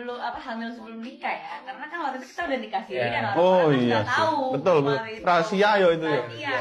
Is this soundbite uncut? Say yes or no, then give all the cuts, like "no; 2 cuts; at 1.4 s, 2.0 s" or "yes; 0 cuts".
yes; 0 cuts